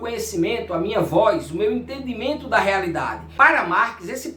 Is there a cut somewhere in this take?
yes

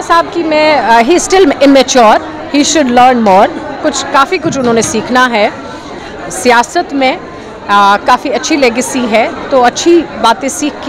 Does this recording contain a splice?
no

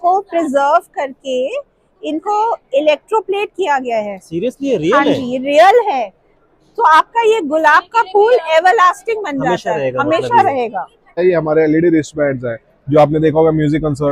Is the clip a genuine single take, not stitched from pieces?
no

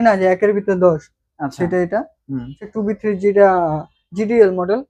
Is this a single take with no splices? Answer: no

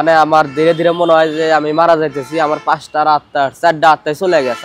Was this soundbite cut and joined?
no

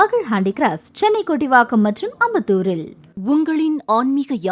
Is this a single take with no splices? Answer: no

